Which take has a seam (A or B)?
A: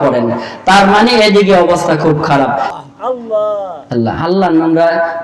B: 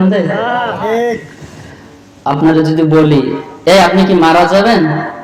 A